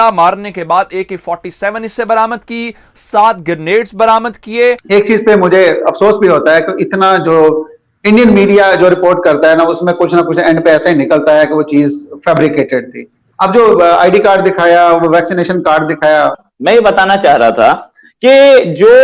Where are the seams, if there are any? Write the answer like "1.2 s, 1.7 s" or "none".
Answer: 4.8 s, 16.4 s